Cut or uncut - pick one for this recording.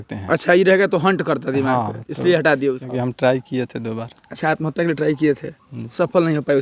cut